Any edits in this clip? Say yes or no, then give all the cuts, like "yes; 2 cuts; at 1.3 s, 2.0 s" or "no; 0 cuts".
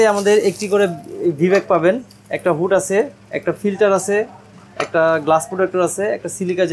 no; 0 cuts